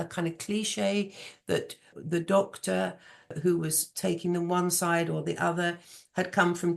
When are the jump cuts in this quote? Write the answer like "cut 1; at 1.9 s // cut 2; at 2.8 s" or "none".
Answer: cut 1; at 1.9 s // cut 2; at 3.3 s